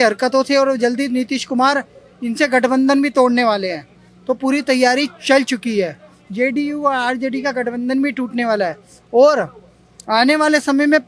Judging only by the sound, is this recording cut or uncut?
uncut